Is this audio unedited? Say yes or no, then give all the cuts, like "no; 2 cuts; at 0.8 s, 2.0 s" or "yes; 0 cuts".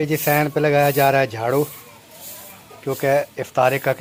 yes; 0 cuts